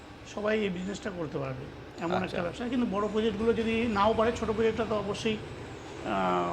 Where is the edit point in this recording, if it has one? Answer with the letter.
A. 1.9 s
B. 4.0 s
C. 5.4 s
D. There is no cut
D